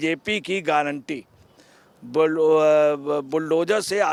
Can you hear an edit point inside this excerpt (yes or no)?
no